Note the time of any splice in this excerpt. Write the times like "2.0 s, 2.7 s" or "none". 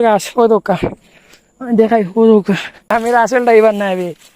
2.7 s